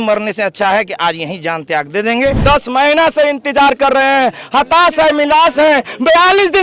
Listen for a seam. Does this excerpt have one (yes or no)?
yes